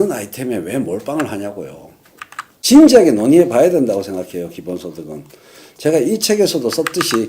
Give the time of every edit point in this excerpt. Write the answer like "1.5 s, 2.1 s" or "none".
2.5 s